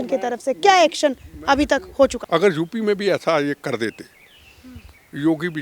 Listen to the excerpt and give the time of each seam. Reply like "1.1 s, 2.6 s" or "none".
2.2 s